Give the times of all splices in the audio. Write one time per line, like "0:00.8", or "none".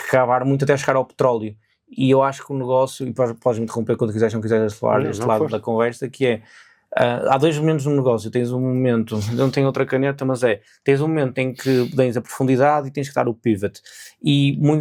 none